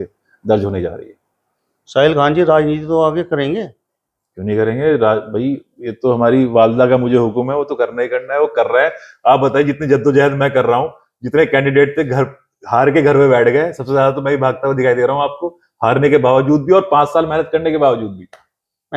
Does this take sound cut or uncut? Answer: uncut